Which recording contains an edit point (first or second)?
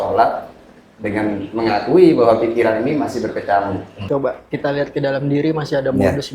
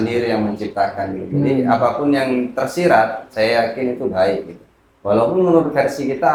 first